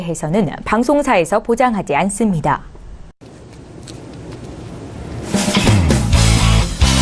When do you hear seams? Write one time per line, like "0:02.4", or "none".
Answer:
0:02.7